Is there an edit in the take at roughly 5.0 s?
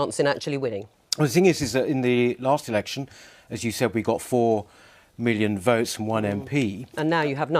yes; 1 cut; at 5.0 s

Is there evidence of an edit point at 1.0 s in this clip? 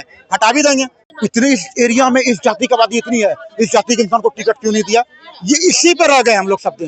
yes; 1 cut; at 1.0 s

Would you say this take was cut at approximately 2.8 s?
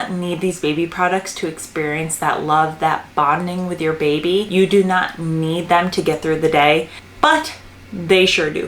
no; 2 cuts; at 4.5 s, 7.0 s

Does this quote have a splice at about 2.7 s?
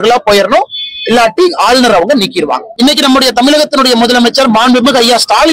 yes; 1 cut; at 2.7 s

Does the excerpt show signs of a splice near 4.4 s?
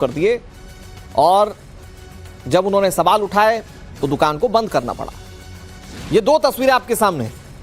no; 1 cut; at 6.6 s

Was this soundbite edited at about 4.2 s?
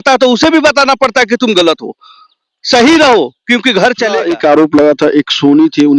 yes; 1 cut; at 4.2 s

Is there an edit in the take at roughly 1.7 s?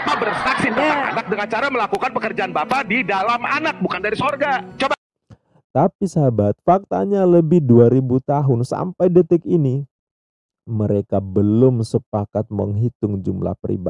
no; 1 cut; at 4.9 s

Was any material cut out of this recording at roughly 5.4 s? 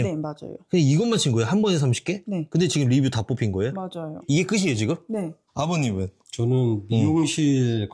yes; 1 cut; at 5.4 s

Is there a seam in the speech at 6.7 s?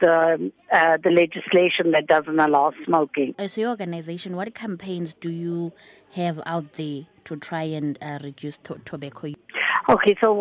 no; 2 cuts; at 3.4 s, 9.4 s

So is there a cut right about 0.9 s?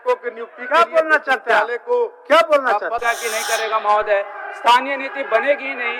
no; 1 cut; at 3.0 s

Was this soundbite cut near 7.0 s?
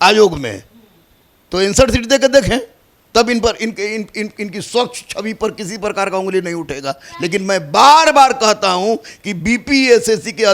no; 0 cuts

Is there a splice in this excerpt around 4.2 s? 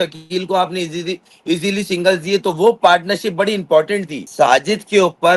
yes; 1 cut; at 4.2 s

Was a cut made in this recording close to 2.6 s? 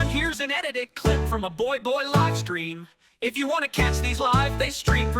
no; 0 cuts

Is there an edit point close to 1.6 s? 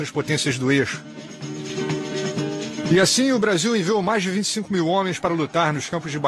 no; 0 cuts

